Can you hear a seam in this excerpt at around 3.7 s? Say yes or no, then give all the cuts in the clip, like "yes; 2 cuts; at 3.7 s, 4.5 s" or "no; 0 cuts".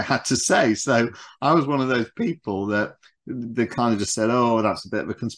no; 0 cuts